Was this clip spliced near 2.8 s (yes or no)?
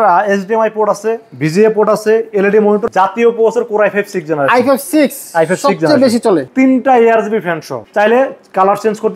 yes